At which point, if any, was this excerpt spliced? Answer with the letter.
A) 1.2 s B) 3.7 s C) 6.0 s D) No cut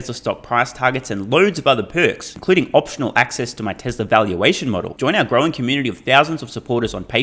D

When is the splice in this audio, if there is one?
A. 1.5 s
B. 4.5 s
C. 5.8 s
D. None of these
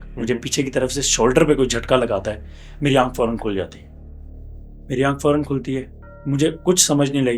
D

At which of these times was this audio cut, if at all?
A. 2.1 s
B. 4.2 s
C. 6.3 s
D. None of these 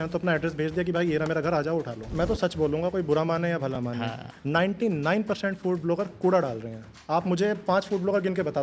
A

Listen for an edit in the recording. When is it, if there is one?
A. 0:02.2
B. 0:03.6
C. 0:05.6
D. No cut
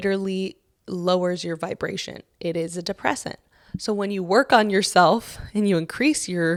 D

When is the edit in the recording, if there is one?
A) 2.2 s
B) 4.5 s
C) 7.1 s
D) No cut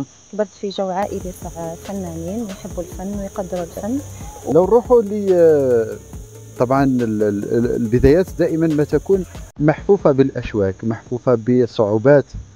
B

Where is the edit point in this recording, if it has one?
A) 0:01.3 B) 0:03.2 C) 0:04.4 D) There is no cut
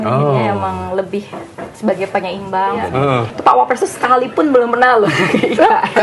B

